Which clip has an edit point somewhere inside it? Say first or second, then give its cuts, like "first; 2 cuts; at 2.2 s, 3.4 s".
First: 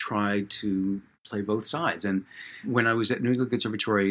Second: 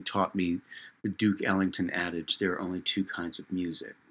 first; 2 cuts; at 1.2 s, 2.7 s